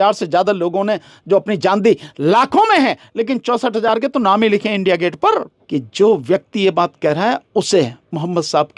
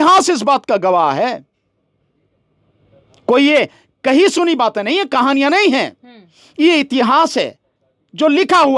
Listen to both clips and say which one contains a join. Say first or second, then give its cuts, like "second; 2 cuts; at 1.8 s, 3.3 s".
first; 1 cut; at 5.6 s